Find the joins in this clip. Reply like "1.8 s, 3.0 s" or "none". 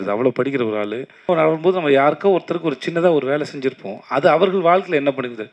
1.3 s